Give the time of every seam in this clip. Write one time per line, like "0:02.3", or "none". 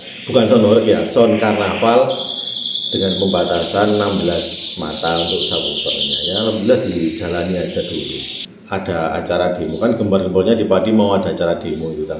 0:08.3